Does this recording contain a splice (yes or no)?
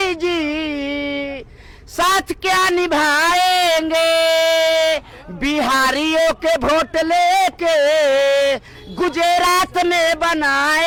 no